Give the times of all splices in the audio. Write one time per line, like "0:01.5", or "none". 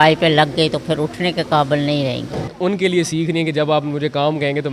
0:02.5